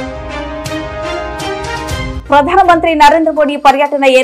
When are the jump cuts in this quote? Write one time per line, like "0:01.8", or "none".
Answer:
0:02.2